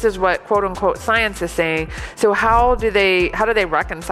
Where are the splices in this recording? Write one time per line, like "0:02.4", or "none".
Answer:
none